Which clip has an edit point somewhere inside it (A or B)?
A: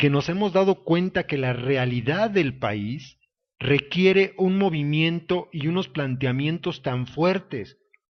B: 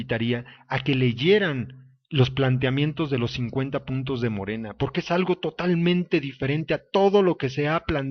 B